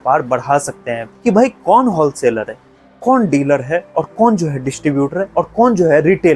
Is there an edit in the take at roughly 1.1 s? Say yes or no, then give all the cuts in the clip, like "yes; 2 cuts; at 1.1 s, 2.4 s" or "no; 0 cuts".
yes; 1 cut; at 1.1 s